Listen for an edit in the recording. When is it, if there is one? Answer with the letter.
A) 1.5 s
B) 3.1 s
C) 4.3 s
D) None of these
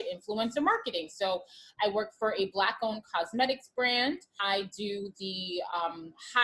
C